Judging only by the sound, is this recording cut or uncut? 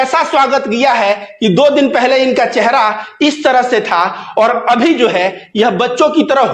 uncut